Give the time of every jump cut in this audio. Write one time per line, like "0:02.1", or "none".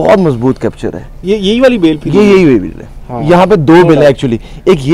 none